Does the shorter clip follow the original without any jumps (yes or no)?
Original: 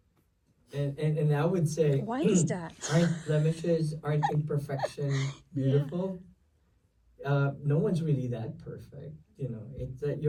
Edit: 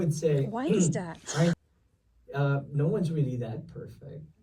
no